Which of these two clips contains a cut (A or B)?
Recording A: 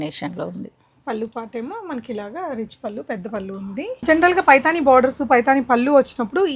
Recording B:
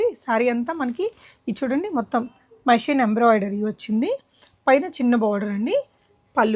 A